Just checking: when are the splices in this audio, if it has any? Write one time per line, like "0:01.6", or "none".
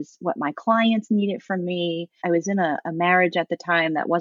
0:02.2

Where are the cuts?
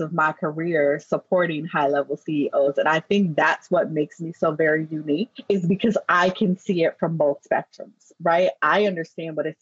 0:05.3

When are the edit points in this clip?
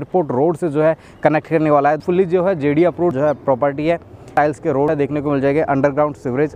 0:02.0
0:03.1
0:04.6

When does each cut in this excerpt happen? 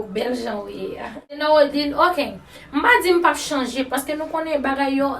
0:01.4

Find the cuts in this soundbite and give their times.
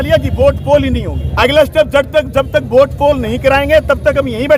none

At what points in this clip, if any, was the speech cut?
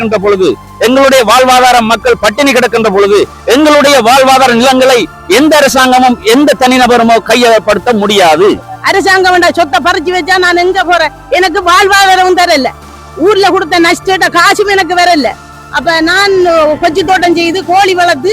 0:08.7

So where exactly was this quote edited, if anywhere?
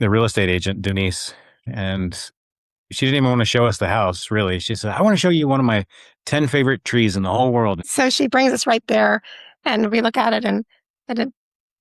0:01.7
0:07.8

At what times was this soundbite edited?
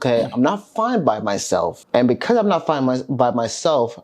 0:01.8

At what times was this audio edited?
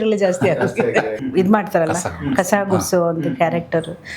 0:01.2

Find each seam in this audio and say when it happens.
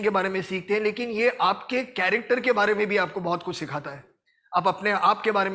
none

